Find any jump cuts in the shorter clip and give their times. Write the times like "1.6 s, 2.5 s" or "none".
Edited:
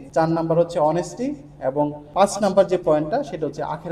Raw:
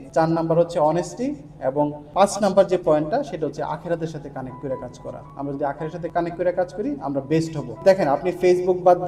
none